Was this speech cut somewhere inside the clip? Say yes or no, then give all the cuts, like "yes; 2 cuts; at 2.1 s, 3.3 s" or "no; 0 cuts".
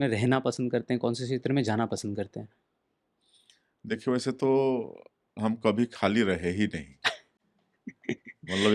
no; 0 cuts